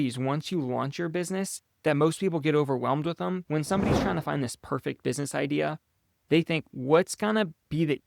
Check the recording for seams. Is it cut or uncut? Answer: cut